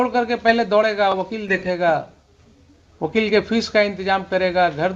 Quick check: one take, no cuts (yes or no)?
yes